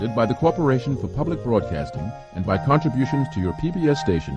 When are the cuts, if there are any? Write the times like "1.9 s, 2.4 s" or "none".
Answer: none